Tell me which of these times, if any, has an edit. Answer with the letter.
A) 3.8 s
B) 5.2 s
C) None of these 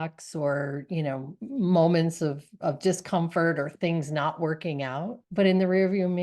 B